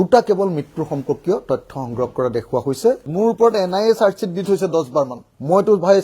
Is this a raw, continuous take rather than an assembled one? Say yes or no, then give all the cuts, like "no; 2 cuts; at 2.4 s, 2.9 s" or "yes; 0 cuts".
no; 1 cut; at 3.0 s